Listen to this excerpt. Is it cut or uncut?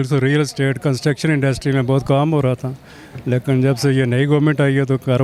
uncut